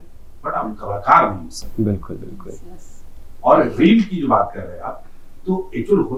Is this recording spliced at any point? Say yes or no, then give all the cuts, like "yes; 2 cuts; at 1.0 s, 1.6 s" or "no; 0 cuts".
no; 0 cuts